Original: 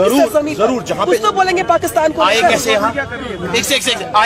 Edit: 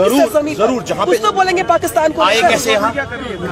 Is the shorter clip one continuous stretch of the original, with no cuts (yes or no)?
yes